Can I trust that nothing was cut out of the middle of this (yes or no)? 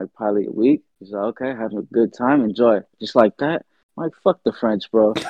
no